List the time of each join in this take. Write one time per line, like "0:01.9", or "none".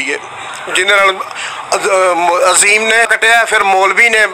0:03.1